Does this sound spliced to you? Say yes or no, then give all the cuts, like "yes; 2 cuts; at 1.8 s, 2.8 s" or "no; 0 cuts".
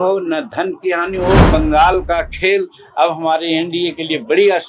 yes; 1 cut; at 1.5 s